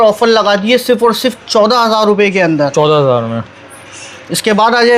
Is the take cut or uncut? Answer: uncut